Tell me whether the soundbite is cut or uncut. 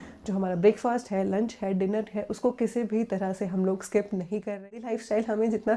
cut